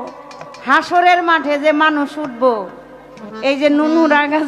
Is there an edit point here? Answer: no; 0 cuts

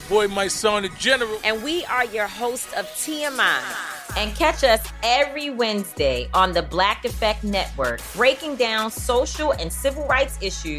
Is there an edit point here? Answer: no; 0 cuts

